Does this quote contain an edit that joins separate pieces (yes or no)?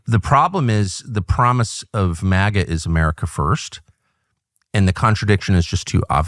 no